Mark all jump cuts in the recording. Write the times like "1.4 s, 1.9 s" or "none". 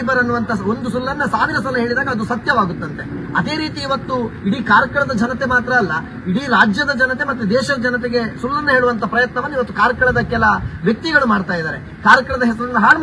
none